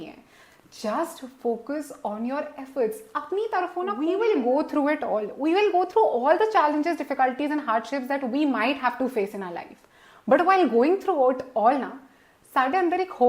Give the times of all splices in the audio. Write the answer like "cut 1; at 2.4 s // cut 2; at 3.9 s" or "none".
cut 1; at 4.0 s